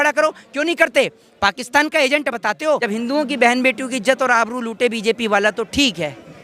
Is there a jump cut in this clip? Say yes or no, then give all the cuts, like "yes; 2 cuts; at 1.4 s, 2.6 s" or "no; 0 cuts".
yes; 1 cut; at 2.8 s